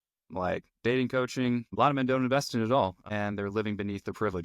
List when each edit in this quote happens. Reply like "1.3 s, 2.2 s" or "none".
1.7 s, 3.0 s